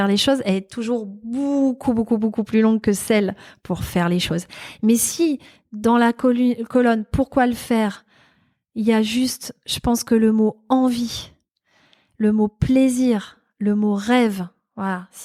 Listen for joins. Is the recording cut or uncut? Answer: uncut